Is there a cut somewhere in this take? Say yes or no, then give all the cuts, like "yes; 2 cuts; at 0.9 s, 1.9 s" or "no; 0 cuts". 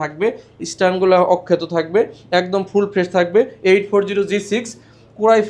no; 0 cuts